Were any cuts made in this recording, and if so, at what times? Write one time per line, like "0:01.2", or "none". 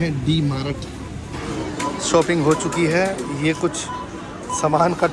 0:01.5